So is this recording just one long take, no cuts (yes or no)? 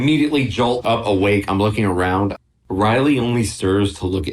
no